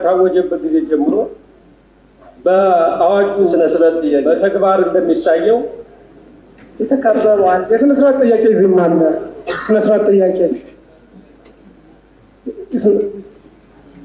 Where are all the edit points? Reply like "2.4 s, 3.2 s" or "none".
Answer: none